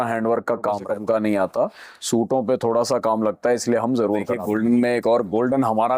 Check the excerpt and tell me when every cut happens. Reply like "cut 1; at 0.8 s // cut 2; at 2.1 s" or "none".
cut 1; at 0.9 s // cut 2; at 4.3 s